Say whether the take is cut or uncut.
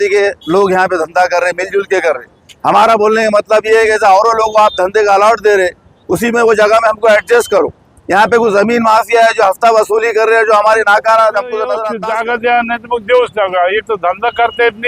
cut